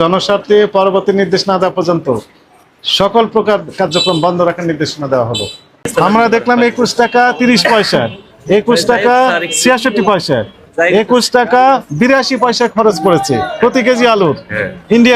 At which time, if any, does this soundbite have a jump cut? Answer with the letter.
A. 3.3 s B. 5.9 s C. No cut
B